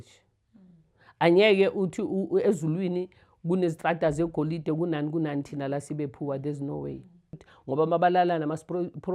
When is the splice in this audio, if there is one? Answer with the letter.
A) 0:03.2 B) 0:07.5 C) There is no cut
B